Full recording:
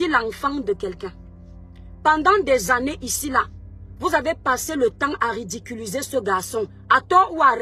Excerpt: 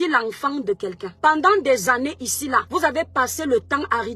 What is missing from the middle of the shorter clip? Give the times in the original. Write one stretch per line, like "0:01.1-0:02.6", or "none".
0:01.1-0:01.9
0:03.5-0:04.0